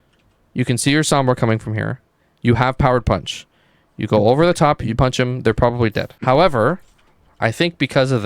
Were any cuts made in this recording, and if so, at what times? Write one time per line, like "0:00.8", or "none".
0:06.1